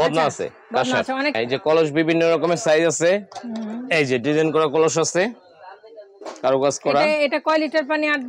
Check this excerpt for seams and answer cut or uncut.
cut